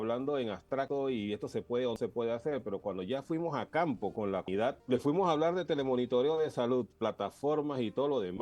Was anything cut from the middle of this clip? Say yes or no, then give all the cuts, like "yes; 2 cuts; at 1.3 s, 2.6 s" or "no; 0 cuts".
yes; 3 cuts; at 0.9 s, 2.0 s, 4.1 s